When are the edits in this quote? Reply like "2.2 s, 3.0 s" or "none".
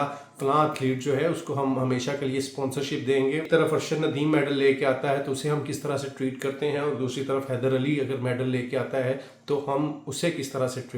3.4 s